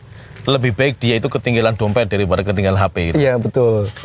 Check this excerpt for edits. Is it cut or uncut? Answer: uncut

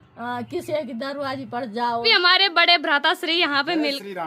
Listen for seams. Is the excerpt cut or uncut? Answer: cut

